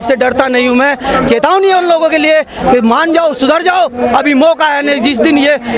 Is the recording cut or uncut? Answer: uncut